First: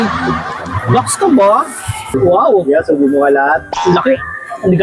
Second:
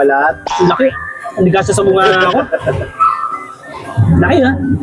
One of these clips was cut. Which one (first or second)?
first